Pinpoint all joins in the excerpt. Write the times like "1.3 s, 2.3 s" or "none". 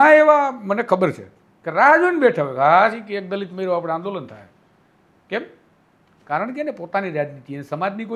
none